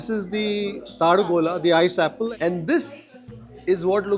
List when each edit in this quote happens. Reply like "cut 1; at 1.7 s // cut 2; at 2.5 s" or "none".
cut 1; at 2.3 s